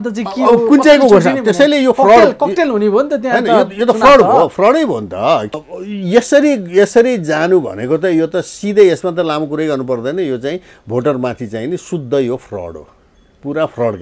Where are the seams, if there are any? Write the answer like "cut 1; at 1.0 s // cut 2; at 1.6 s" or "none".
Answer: cut 1; at 5.6 s